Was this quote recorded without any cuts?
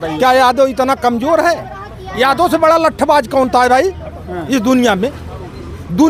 yes; 0 cuts

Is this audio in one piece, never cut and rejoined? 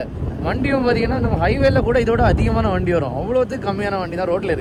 yes; 0 cuts

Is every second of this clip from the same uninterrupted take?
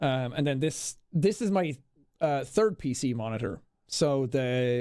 no; 1 cut; at 0.9 s

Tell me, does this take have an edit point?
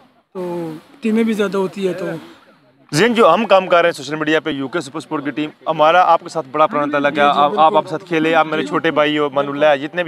no; 0 cuts

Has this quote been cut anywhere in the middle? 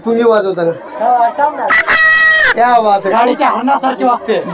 no; 0 cuts

